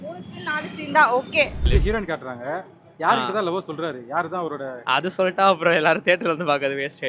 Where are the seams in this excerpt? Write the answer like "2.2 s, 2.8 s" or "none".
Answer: 1.7 s